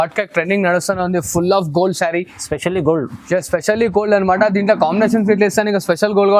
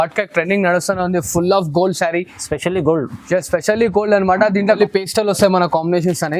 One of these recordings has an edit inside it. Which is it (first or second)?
second